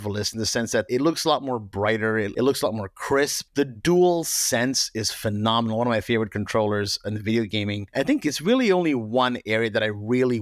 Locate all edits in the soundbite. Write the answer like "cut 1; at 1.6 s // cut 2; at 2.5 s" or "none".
cut 1; at 0.9 s // cut 2; at 2.3 s // cut 3; at 3.4 s // cut 4; at 7.8 s

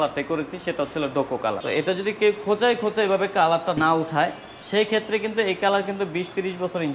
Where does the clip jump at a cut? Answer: cut 1; at 1.6 s // cut 2; at 3.8 s

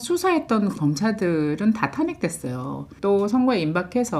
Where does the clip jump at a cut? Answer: cut 1; at 2.9 s

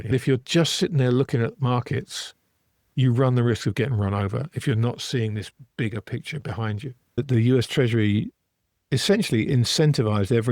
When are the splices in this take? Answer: cut 1; at 7.2 s

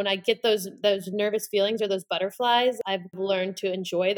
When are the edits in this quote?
cut 1; at 3.0 s

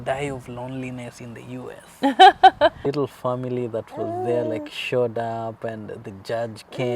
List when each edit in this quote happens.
cut 1; at 2.8 s

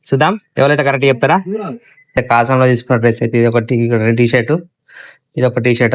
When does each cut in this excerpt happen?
cut 1; at 2.1 s

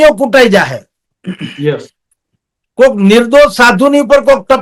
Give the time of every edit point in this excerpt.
none

